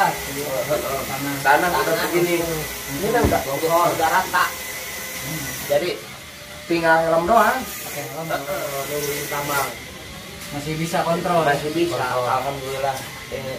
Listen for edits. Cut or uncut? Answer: cut